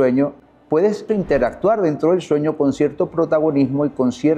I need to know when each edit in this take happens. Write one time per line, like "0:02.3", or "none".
0:01.1